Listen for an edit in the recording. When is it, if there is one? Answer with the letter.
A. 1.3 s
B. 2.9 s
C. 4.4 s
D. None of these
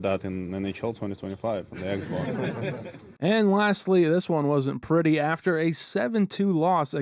D